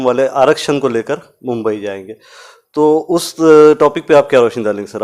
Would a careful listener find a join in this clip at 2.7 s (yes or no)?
no